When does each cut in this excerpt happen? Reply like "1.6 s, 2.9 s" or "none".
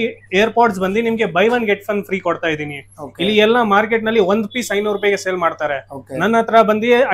none